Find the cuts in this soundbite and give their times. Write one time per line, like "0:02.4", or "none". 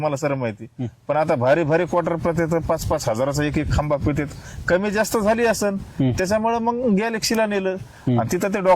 0:01.2